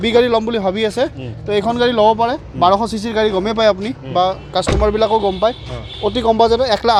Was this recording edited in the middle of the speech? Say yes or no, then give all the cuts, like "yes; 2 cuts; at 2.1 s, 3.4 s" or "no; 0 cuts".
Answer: no; 0 cuts